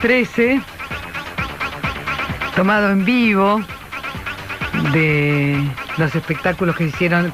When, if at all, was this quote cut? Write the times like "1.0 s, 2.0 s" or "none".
none